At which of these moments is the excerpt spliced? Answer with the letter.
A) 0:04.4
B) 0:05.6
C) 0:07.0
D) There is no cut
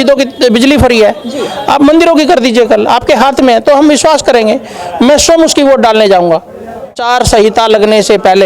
C